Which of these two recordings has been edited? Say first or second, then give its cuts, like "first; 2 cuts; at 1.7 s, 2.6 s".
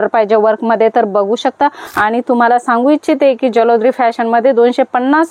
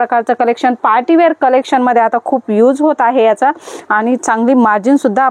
first; 1 cut; at 1.8 s